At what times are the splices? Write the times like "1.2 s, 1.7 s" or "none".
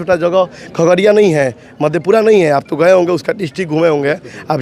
none